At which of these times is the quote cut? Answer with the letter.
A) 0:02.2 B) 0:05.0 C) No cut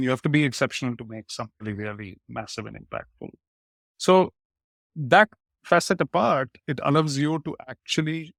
C